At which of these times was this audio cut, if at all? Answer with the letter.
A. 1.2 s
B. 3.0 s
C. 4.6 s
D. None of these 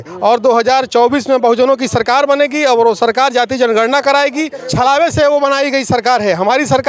C